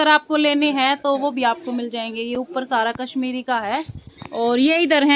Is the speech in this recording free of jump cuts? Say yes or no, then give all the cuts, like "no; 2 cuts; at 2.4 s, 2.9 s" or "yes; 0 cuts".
yes; 0 cuts